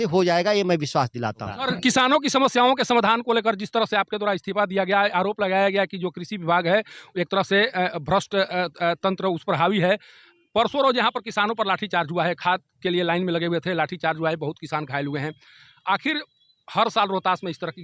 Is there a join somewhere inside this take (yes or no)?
no